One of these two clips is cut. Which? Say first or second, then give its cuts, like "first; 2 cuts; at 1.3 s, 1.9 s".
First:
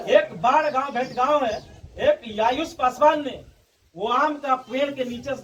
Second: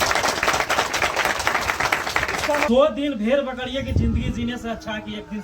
second; 1 cut; at 2.7 s